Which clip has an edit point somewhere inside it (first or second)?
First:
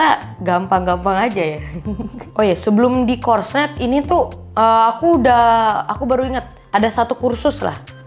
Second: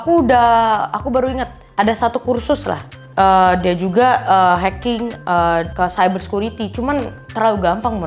first